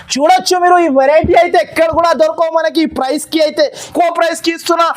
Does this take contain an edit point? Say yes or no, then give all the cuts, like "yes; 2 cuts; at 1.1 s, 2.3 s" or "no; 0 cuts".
yes; 1 cut; at 3.8 s